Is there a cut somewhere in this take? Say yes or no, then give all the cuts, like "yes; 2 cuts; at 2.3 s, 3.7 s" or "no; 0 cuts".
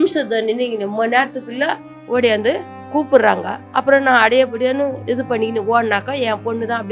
yes; 1 cut; at 5.0 s